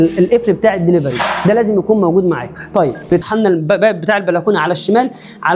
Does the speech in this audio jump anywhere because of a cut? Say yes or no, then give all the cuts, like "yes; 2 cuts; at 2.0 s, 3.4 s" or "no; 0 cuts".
yes; 1 cut; at 3.2 s